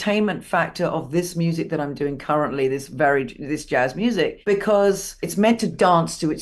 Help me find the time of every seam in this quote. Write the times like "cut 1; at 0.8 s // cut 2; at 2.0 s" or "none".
cut 1; at 4.4 s // cut 2; at 5.2 s